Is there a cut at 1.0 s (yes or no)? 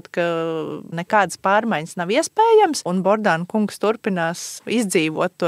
yes